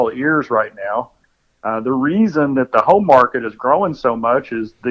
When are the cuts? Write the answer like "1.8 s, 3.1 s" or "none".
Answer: none